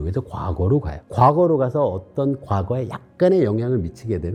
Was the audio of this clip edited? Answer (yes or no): no